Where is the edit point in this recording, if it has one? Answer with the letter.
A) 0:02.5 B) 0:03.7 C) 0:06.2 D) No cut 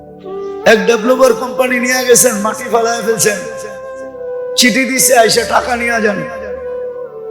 C